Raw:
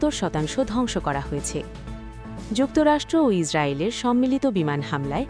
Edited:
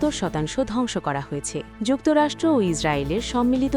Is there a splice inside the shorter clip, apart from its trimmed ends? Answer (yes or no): yes